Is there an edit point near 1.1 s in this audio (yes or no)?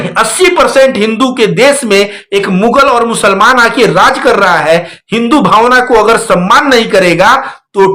no